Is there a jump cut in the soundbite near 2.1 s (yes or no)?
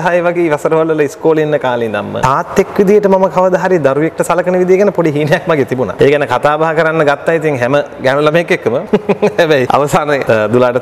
yes